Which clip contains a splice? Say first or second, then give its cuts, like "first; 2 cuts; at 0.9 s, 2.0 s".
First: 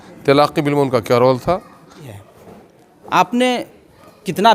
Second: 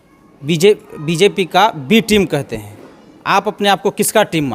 first; 1 cut; at 2.1 s